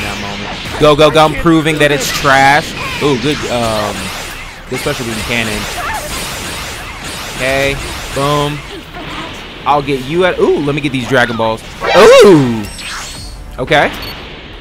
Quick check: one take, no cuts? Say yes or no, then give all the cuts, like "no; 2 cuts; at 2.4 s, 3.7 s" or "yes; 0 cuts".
yes; 0 cuts